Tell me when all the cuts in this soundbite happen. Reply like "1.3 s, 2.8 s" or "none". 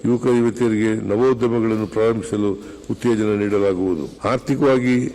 4.1 s

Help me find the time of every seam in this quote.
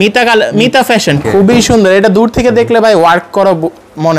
1.2 s

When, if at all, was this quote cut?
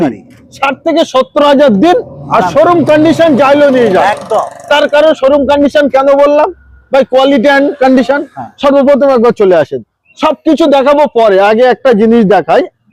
none

